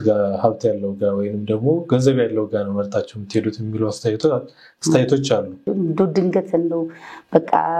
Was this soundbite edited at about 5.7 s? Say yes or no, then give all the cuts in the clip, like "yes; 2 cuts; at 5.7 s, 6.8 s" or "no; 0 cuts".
yes; 1 cut; at 5.7 s